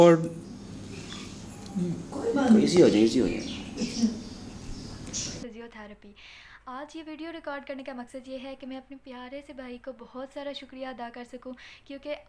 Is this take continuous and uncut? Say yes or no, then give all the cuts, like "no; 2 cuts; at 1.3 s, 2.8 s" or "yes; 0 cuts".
no; 1 cut; at 5.4 s